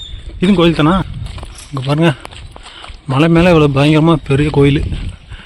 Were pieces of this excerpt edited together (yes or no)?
yes